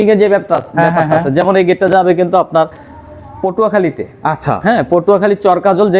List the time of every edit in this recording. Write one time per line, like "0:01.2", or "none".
none